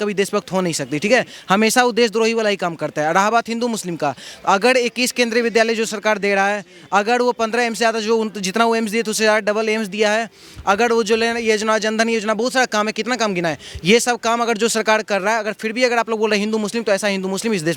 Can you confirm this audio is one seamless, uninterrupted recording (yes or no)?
yes